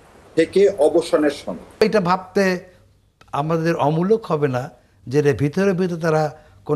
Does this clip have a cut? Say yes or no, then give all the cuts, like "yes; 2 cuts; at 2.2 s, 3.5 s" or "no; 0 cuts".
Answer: yes; 1 cut; at 1.8 s